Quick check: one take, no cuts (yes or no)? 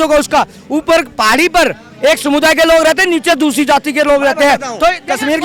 yes